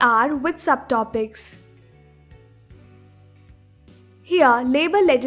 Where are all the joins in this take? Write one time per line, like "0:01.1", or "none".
0:01.4
0:04.2